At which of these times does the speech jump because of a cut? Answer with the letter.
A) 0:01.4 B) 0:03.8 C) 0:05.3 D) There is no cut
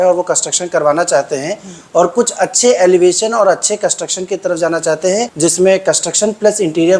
C